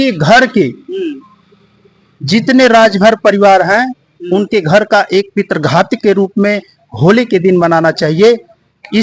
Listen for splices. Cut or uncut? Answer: uncut